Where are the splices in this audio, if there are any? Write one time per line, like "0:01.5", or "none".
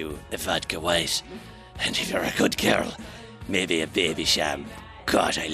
none